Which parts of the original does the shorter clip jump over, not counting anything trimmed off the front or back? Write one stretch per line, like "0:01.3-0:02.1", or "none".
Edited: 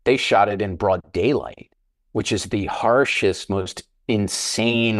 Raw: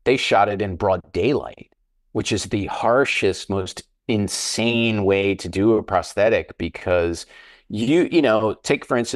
none